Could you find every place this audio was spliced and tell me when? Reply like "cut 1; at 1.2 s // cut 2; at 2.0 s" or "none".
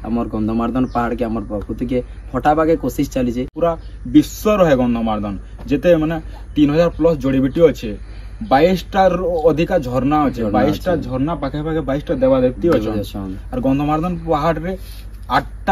cut 1; at 3.5 s